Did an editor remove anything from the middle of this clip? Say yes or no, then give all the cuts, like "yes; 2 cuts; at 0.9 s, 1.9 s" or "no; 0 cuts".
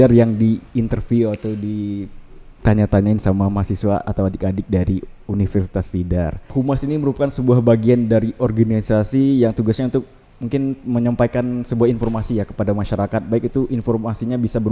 yes; 1 cut; at 6.4 s